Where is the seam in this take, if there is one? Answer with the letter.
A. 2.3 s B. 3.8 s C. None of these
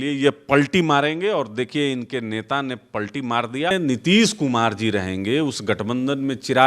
B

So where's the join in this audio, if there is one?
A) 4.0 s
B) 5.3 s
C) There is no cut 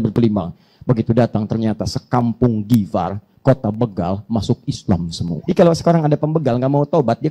B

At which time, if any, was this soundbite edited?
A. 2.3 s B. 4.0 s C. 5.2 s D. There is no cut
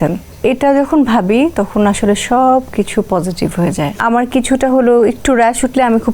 B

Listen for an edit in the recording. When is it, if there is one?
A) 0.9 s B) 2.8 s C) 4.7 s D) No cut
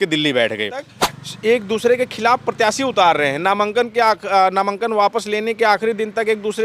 A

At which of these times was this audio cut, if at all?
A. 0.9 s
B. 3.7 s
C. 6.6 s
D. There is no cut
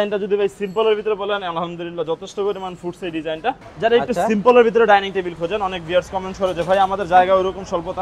B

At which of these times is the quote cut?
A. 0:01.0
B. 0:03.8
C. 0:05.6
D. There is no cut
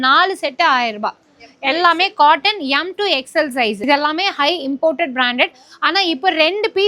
B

